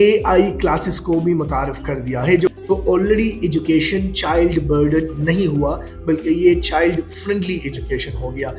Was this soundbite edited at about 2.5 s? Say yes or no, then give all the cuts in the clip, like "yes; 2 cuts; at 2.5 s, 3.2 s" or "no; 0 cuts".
yes; 1 cut; at 2.5 s